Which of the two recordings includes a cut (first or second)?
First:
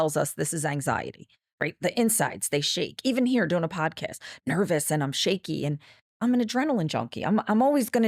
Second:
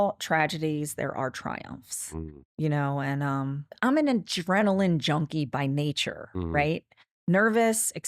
second